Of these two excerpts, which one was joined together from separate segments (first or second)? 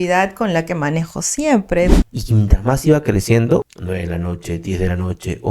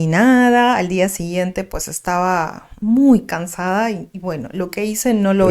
first